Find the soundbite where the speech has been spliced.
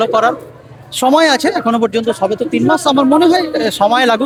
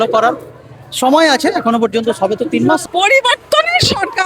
second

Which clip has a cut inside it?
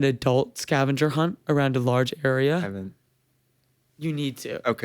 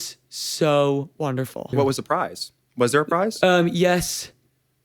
second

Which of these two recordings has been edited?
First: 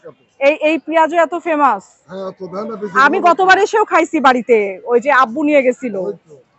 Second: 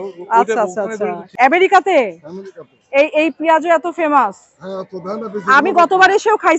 second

